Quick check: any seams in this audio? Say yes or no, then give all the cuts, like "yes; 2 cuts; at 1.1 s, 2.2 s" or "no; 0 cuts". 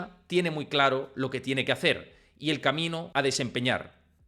yes; 1 cut; at 3.1 s